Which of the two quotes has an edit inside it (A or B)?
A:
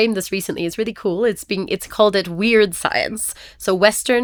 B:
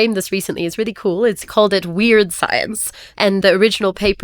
B